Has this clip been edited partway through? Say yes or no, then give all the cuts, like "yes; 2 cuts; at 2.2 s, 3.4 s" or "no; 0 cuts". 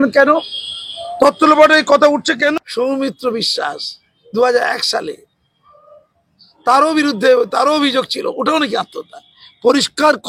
yes; 1 cut; at 2.5 s